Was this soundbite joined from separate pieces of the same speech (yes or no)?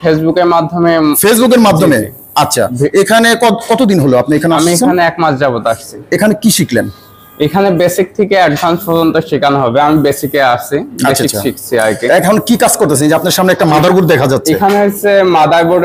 no